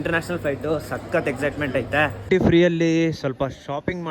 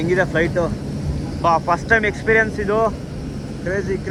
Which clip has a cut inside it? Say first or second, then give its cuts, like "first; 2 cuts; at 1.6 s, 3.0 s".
first; 1 cut; at 2.2 s